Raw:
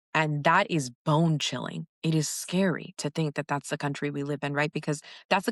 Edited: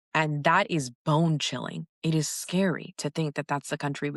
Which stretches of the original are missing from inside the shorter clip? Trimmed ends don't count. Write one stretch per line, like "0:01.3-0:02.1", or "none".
none